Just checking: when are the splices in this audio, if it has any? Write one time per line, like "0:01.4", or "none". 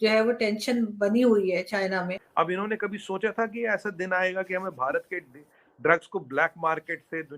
0:02.2